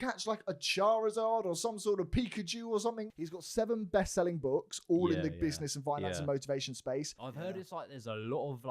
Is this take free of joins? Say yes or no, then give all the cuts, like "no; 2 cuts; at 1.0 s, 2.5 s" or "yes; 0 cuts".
no; 2 cuts; at 3.1 s, 7.2 s